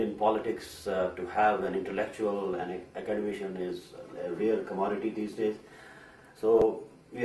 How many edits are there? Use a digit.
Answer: 1